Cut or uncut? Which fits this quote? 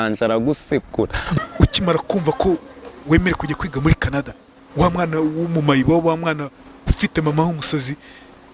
cut